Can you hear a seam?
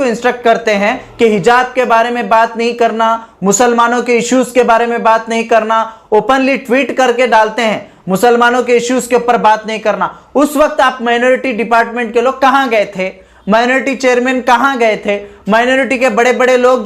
no; 0 cuts

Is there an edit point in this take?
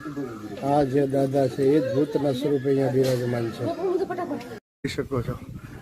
yes; 1 cut; at 4.9 s

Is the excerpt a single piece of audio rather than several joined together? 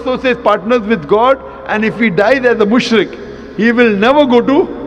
yes; 0 cuts

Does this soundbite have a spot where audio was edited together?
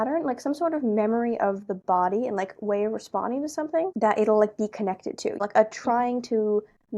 yes; 2 cuts; at 3.9 s, 5.4 s

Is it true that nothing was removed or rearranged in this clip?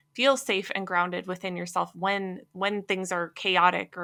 yes; 0 cuts

